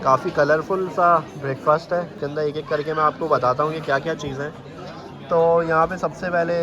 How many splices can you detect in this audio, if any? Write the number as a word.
zero